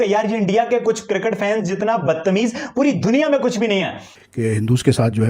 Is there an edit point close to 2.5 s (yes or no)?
no